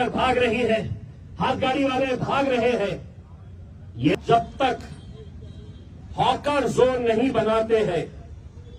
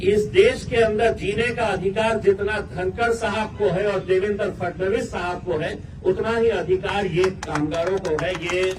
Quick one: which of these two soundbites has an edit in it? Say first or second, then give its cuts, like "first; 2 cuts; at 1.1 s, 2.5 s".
first; 1 cut; at 4.1 s